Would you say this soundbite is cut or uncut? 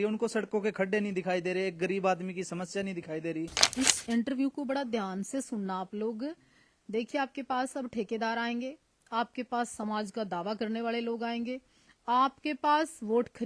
cut